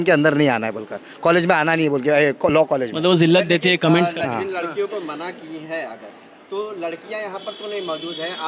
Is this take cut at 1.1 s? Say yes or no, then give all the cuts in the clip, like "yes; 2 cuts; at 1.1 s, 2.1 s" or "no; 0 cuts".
no; 0 cuts